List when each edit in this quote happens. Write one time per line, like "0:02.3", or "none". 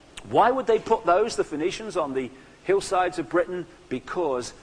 none